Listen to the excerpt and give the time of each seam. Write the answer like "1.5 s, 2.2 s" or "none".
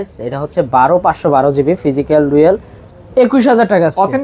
2.8 s